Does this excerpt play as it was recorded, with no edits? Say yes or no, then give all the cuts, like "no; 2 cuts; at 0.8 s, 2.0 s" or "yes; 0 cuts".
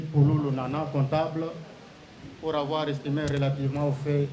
yes; 0 cuts